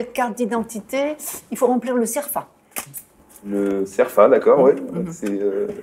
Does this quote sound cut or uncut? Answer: cut